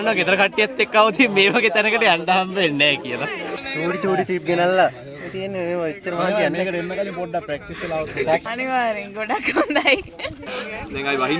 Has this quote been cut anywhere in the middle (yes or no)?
yes